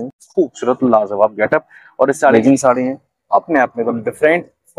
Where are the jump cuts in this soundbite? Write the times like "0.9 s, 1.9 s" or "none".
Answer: 2.2 s